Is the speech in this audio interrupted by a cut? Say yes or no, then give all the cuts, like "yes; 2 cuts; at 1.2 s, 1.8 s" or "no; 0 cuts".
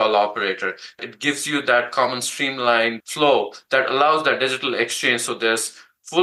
yes; 2 cuts; at 1.1 s, 3.0 s